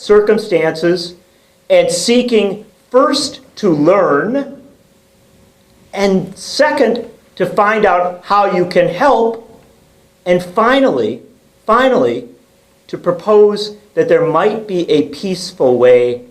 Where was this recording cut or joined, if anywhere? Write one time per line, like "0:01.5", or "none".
0:11.4

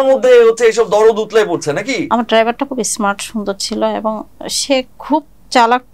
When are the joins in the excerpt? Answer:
0:02.0

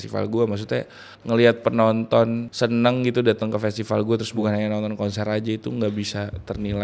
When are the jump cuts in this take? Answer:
0:01.1
0:02.5
0:04.4

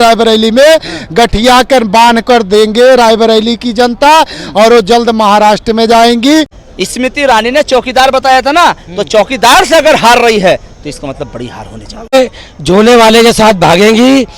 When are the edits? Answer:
0:06.6
0:12.1

